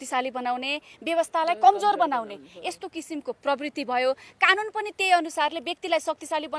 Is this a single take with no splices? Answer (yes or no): yes